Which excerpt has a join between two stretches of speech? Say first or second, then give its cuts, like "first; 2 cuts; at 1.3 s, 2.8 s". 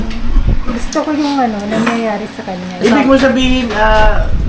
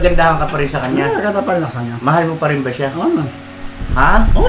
first; 1 cut; at 2.8 s